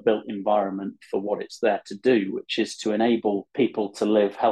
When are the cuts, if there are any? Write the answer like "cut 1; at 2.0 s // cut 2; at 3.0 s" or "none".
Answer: cut 1; at 3.5 s